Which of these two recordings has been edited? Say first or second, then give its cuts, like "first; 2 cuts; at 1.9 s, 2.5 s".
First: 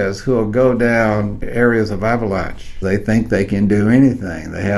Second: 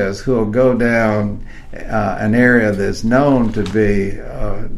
first; 2 cuts; at 1.4 s, 2.7 s